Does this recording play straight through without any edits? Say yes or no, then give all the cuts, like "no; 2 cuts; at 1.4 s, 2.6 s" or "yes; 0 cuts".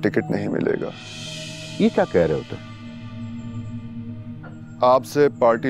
yes; 0 cuts